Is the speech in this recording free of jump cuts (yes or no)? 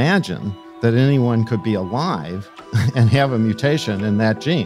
yes